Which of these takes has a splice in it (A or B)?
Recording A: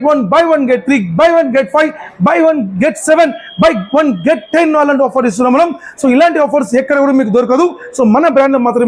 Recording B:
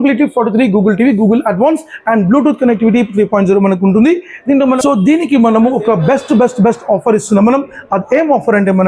B